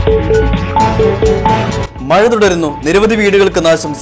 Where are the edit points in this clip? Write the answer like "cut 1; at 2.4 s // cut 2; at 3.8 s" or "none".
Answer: cut 1; at 1.5 s